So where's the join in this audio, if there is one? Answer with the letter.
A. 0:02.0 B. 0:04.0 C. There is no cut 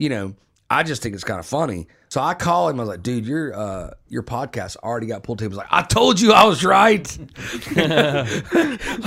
A